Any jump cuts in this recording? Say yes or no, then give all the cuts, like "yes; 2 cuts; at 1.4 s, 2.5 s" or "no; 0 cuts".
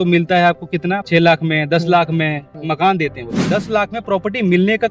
yes; 2 cuts; at 1.0 s, 3.3 s